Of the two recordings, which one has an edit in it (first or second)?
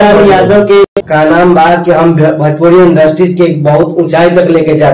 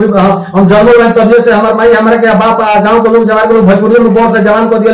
first